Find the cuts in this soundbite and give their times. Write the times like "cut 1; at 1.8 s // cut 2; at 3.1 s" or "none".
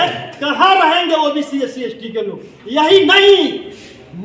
none